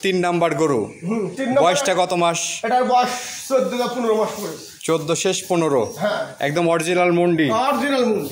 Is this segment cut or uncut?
uncut